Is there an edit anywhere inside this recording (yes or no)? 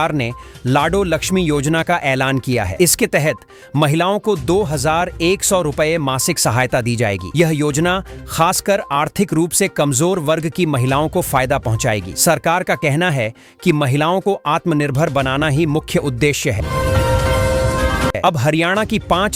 no